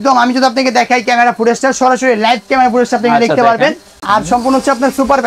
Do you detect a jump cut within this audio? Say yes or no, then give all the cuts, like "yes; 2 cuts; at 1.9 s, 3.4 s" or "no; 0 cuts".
no; 0 cuts